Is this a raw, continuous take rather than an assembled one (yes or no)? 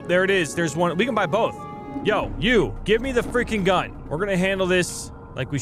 no